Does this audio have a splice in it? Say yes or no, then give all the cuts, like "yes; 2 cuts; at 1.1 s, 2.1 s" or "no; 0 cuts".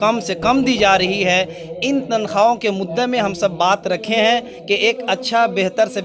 no; 0 cuts